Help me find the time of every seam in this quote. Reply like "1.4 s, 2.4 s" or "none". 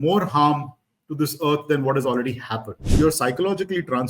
2.8 s